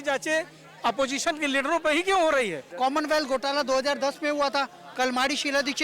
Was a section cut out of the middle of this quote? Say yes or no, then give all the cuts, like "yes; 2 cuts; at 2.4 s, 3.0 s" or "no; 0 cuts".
yes; 1 cut; at 2.6 s